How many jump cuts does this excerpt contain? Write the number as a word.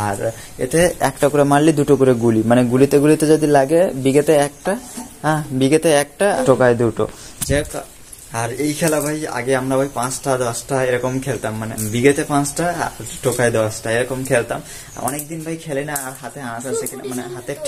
two